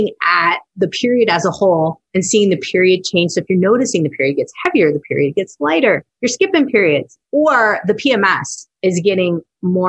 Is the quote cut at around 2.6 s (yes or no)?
no